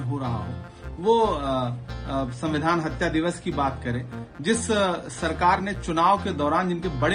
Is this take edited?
no; 0 cuts

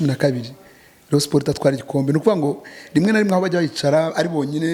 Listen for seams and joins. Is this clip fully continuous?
yes; 0 cuts

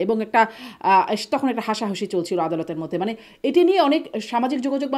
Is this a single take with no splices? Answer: yes; 0 cuts

